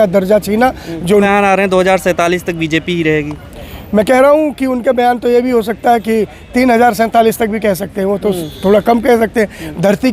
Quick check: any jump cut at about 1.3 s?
yes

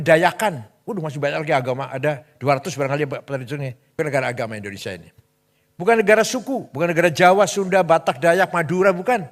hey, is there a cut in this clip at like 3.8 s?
yes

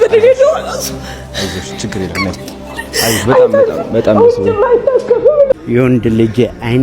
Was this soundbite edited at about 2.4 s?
no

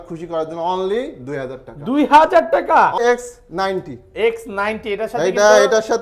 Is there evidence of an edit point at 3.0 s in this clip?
yes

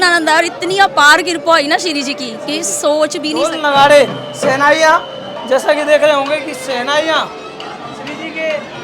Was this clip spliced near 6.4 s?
no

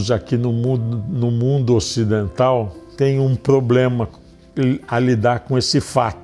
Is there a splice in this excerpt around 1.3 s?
no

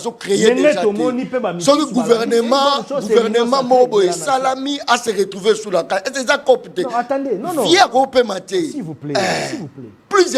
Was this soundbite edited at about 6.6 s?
no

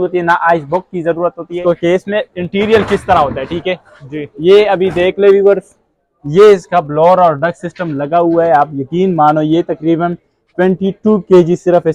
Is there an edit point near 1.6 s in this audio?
yes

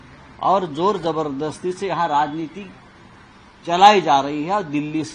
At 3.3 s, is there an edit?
no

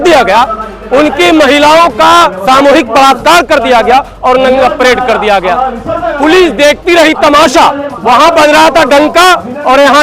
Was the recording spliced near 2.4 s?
yes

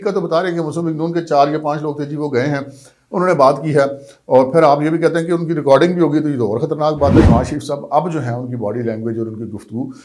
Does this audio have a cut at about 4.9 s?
no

